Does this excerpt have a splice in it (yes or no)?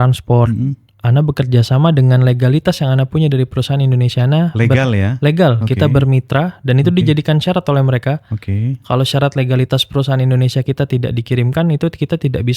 no